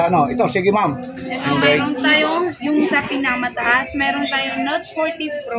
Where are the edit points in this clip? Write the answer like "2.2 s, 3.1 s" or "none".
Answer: none